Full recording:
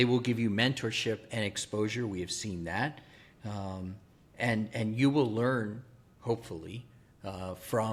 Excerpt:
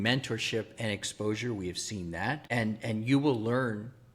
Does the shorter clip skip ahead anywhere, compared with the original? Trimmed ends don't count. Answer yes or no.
yes